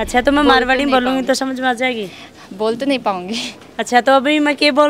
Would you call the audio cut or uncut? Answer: uncut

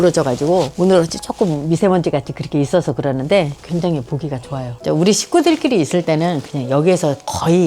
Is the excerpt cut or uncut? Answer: cut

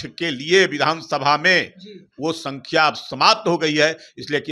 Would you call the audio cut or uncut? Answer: uncut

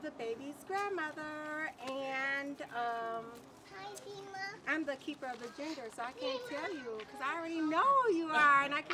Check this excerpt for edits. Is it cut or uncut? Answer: uncut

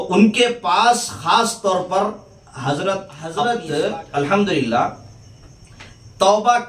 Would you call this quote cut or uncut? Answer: cut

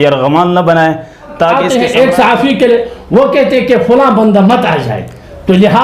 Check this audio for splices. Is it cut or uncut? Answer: cut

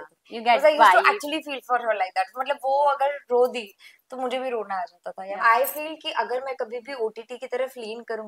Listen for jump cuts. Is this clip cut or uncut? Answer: cut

